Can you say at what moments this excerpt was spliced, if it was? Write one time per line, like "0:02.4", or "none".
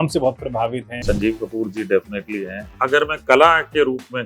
0:02.6